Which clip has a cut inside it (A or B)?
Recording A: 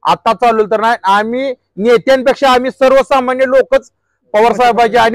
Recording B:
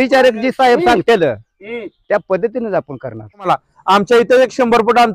B